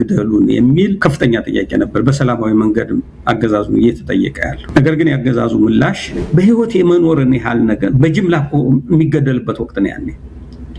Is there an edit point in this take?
yes; 3 cuts; at 1.0 s, 4.5 s, 6.1 s

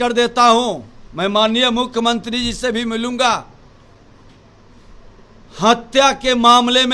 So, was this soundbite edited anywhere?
no; 0 cuts

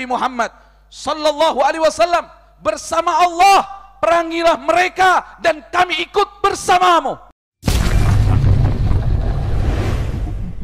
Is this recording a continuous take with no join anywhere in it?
no; 1 cut; at 7.3 s

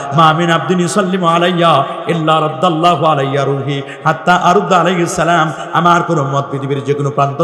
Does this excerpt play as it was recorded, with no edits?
yes; 0 cuts

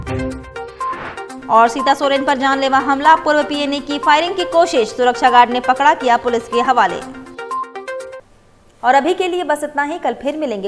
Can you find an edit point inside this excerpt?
no; 0 cuts

